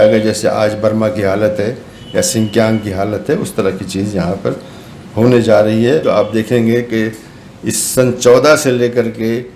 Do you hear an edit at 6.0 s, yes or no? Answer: yes